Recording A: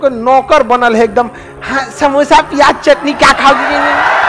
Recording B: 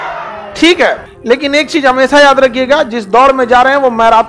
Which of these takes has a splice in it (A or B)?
B